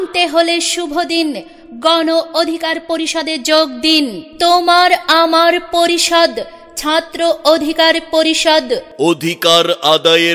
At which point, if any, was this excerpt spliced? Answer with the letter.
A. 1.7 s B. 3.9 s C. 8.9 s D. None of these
C